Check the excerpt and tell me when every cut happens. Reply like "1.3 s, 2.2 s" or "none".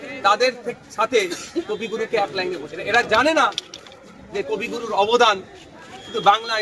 2.8 s